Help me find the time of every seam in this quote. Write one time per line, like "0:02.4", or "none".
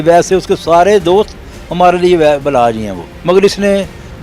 0:03.0